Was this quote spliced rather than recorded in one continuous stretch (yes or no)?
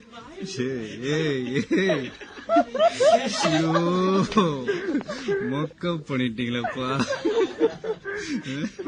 no